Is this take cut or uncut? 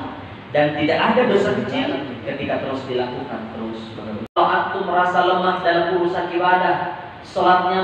cut